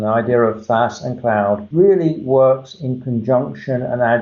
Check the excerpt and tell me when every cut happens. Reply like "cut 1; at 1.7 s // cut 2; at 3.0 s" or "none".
cut 1; at 1.7 s